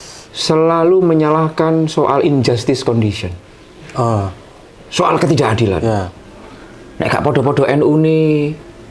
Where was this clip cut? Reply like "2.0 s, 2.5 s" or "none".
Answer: 6.2 s